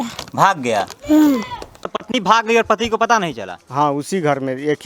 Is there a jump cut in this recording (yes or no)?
yes